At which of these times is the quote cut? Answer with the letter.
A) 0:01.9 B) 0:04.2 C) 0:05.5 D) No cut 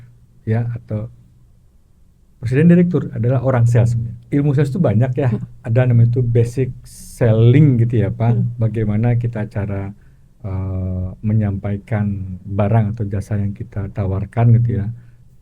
B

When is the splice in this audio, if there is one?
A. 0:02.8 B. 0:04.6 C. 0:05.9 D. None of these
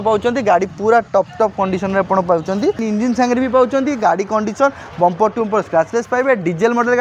A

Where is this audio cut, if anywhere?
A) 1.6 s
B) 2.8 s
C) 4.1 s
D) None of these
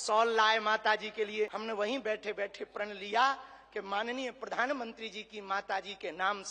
A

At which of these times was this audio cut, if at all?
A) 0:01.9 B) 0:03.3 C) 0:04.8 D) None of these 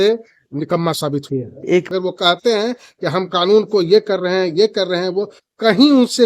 A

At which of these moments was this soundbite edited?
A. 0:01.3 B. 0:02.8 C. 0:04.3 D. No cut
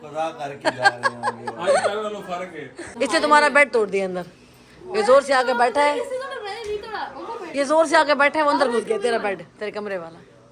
B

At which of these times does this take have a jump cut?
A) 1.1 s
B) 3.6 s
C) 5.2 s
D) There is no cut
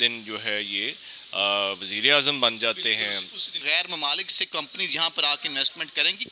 B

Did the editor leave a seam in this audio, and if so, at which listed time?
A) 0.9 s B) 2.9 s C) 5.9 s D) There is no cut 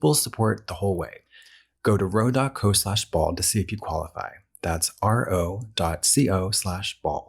A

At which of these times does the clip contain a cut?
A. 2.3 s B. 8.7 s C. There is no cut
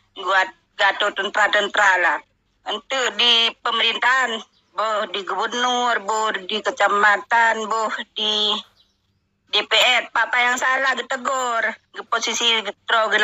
C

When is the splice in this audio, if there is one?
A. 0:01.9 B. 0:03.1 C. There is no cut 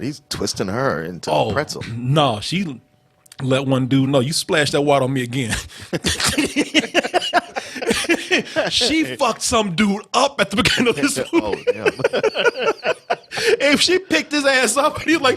A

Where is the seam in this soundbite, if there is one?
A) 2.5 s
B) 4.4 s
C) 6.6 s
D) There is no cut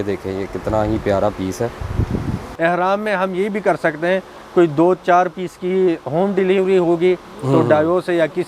A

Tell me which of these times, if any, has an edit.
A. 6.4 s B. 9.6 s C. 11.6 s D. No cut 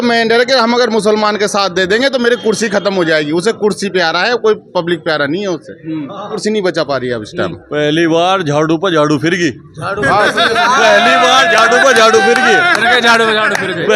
A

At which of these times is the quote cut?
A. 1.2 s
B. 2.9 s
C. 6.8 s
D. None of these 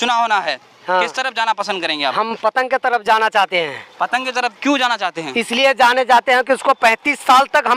D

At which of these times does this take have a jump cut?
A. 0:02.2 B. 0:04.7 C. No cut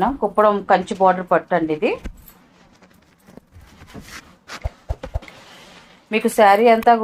C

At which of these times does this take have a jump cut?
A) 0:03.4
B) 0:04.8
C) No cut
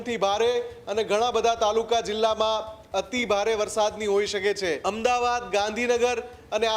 B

